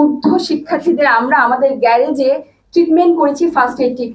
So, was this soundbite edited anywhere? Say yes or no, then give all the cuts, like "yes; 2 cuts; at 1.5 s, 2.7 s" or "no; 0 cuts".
no; 0 cuts